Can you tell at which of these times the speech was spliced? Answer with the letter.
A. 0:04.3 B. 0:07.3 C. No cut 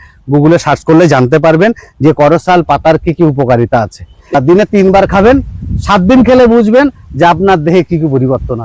A